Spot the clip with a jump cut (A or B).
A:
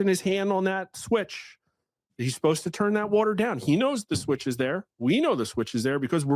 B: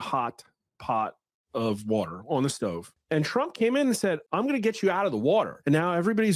B